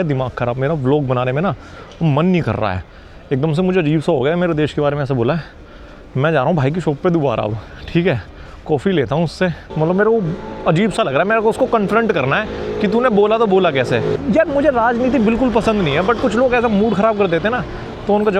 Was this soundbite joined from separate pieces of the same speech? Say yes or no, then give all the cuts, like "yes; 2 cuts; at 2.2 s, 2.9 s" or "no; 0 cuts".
no; 0 cuts